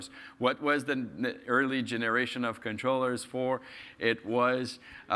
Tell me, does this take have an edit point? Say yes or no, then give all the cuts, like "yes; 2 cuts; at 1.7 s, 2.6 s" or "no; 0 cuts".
yes; 1 cut; at 2.7 s